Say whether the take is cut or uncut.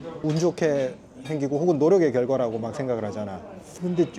uncut